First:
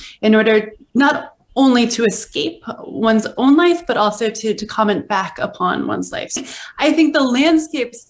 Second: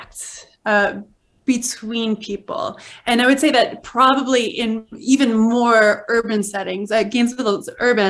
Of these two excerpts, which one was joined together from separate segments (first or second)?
first